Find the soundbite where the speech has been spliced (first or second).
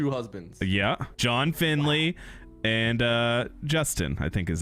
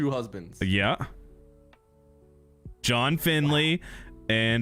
first